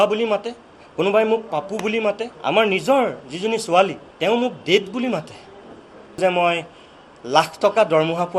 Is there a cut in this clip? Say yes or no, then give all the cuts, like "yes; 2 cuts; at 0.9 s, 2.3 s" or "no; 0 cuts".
yes; 3 cuts; at 2.3 s, 4.0 s, 6.2 s